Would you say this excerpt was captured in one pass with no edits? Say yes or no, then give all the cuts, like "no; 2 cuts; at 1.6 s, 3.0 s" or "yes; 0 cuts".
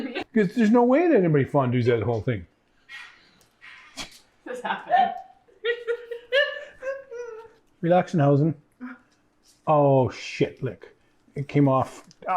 no; 2 cuts; at 5.4 s, 7.6 s